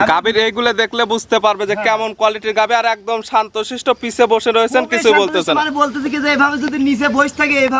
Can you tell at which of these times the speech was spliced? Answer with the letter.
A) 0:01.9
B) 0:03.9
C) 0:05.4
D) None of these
D